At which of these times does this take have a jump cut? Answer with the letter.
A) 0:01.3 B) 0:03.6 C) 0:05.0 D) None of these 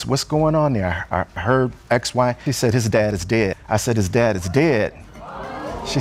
D